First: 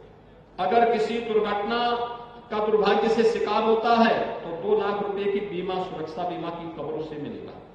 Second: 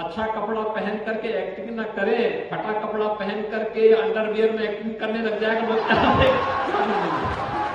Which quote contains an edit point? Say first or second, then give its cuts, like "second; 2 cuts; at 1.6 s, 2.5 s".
second; 1 cut; at 6.3 s